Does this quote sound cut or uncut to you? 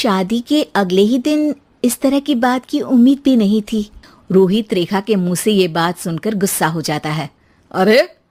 uncut